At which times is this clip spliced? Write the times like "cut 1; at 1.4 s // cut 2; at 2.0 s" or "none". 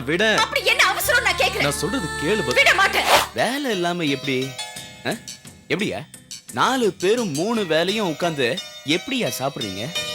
cut 1; at 3.2 s